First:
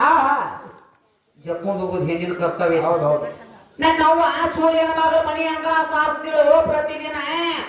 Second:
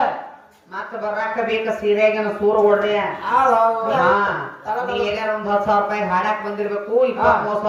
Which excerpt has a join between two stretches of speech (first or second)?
second